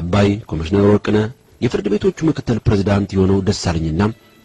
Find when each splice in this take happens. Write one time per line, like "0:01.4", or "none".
none